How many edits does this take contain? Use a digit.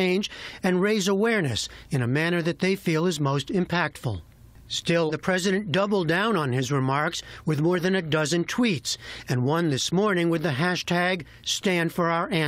1